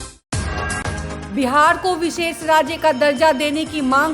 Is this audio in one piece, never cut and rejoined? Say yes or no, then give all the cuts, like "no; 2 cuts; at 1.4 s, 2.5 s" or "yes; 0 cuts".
yes; 0 cuts